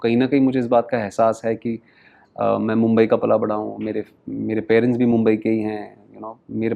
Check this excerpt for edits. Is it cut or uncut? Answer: uncut